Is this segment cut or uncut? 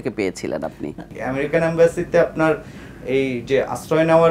cut